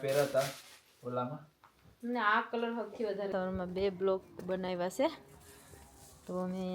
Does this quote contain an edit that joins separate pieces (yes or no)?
yes